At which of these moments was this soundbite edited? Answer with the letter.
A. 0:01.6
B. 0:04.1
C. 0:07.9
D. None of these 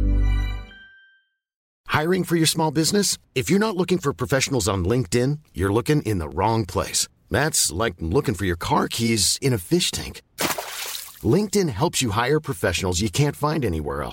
A